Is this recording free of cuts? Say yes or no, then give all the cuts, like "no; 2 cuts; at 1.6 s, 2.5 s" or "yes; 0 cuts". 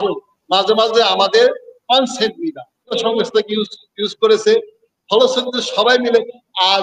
no; 1 cut; at 2.9 s